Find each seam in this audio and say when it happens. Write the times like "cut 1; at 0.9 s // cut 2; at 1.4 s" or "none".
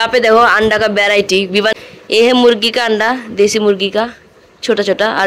cut 1; at 1.7 s